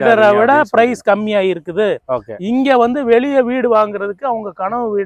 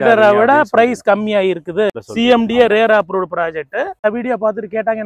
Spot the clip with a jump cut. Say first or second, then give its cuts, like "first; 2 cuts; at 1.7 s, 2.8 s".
second; 2 cuts; at 2.0 s, 4.0 s